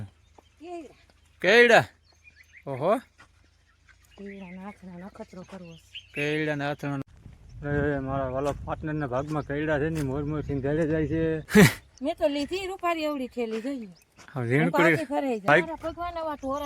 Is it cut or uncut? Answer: cut